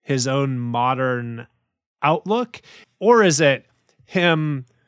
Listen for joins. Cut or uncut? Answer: cut